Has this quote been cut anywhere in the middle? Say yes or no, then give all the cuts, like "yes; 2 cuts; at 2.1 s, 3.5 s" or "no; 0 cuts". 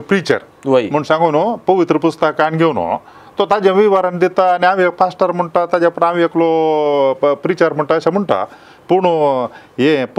no; 0 cuts